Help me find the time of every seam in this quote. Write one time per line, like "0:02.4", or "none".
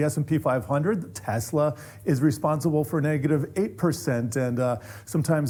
none